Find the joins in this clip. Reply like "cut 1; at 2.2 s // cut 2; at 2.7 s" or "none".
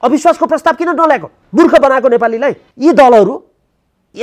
cut 1; at 1.4 s // cut 2; at 2.7 s

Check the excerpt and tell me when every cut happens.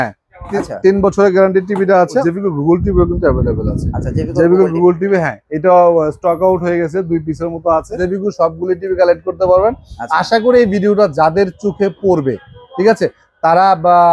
cut 1; at 2.2 s // cut 2; at 8.0 s

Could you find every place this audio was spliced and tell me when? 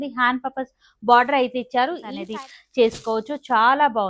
cut 1; at 2.1 s

